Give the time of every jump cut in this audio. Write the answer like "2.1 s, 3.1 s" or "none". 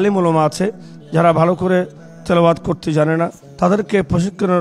3.4 s